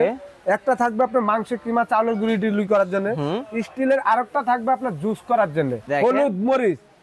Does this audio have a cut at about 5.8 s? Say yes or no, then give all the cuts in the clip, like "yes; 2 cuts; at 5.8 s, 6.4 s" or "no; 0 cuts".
yes; 1 cut; at 5.8 s